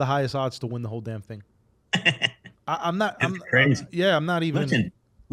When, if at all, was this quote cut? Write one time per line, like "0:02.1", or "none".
none

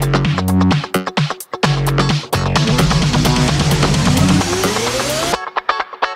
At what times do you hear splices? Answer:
none

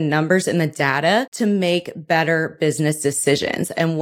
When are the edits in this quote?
0:01.3

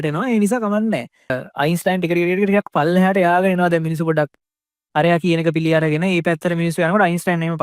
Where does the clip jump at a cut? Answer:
0:01.3

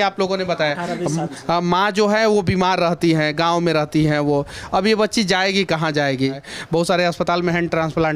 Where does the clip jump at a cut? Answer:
0:06.5

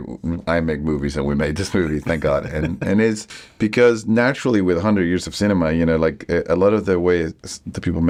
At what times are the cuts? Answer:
none

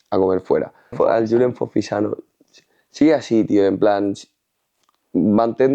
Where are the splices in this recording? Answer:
0:00.9

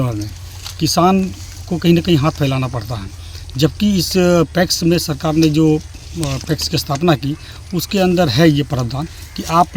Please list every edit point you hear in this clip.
none

